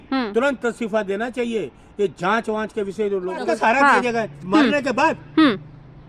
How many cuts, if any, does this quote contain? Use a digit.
1